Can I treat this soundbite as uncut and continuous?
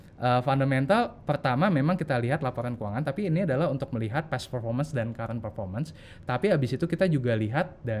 yes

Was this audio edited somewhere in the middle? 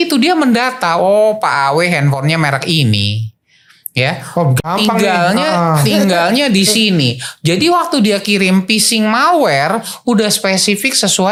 no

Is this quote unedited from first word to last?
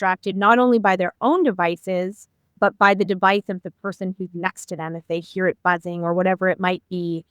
no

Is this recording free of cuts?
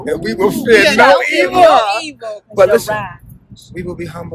yes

